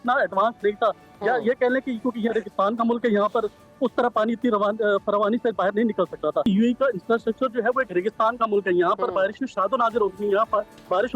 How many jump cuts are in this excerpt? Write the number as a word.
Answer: one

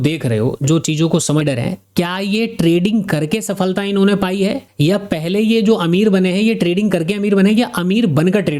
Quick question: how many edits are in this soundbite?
one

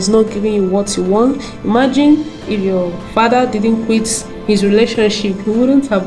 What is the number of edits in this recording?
zero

